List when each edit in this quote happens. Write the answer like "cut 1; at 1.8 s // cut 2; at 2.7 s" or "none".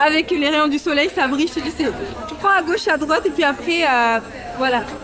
cut 1; at 2.2 s